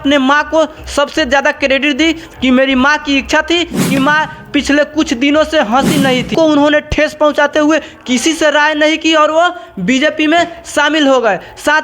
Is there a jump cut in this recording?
yes; 2 cuts; at 4.0 s, 6.3 s

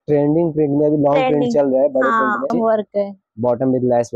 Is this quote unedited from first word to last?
no; 1 cut; at 2.5 s

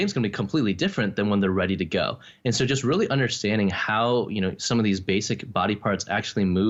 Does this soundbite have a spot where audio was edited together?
no; 0 cuts

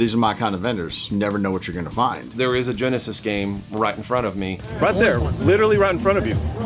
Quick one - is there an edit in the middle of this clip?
yes; 2 cuts; at 2.2 s, 4.7 s

